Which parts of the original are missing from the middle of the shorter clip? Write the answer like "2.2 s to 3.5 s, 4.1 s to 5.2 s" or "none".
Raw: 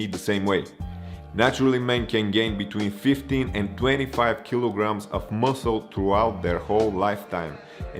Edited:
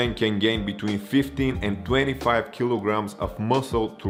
none